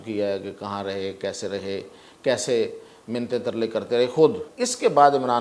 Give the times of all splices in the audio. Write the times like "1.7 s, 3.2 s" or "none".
4.5 s